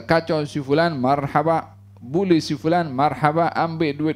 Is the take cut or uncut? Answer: uncut